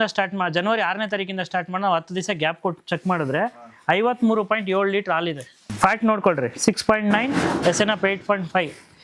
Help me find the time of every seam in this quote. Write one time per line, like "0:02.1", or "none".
0:05.6